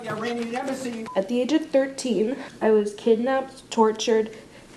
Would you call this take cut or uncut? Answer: cut